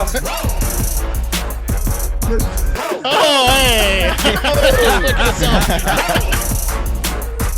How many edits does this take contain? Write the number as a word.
zero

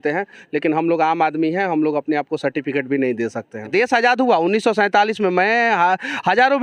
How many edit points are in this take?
one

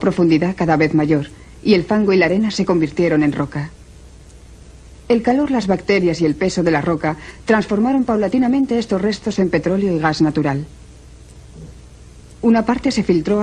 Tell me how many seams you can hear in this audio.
one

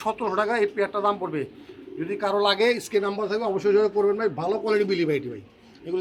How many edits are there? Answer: zero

